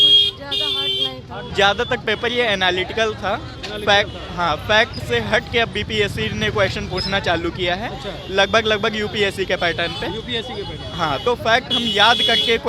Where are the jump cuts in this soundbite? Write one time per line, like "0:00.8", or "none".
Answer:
0:01.5
0:11.2